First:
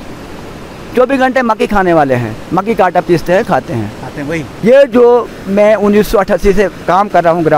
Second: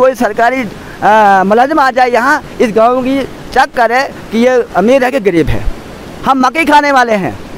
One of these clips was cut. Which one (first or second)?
first